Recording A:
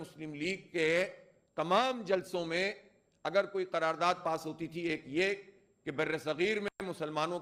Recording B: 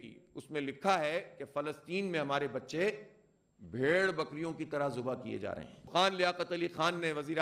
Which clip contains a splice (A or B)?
B